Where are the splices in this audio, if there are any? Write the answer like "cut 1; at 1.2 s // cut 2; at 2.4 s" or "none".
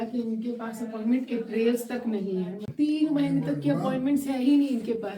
cut 1; at 2.7 s

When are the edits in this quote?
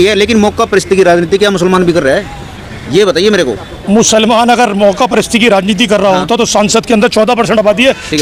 none

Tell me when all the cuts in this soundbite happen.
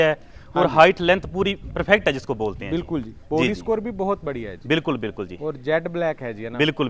none

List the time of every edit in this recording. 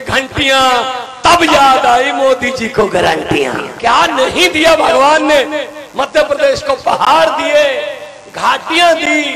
cut 1; at 3.7 s

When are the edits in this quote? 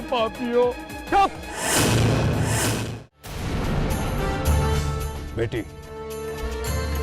cut 1; at 2.9 s

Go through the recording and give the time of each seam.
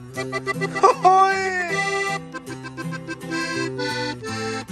none

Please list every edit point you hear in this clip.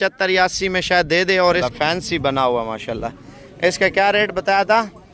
cut 1; at 1.6 s

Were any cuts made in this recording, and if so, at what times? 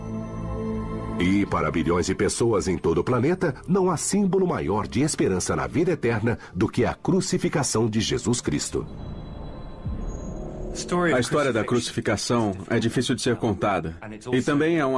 none

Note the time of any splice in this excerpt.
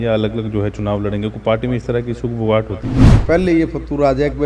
cut 1; at 3.2 s

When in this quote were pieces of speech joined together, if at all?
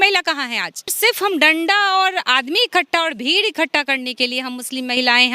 cut 1; at 0.9 s

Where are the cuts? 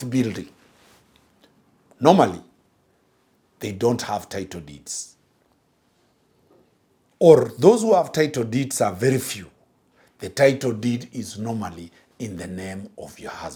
none

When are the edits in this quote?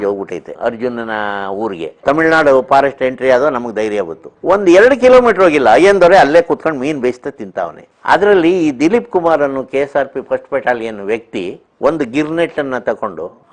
cut 1; at 2.0 s // cut 2; at 7.8 s

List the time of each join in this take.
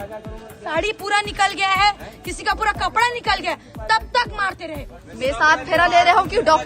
cut 1; at 5.0 s

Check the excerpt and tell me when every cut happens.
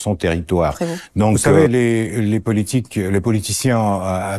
cut 1; at 1.5 s

